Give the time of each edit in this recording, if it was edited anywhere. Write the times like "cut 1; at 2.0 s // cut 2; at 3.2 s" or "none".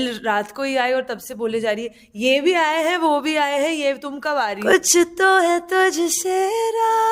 cut 1; at 4.6 s